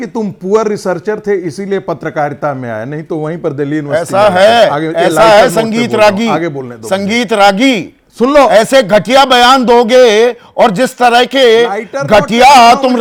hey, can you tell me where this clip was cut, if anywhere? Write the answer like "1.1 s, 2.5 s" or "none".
none

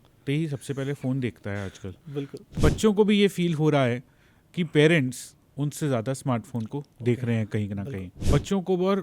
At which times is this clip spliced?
2.6 s, 8.1 s

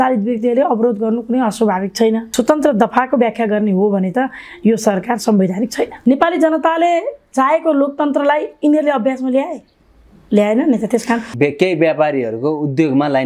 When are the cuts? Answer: 2.3 s, 5.9 s, 11.3 s

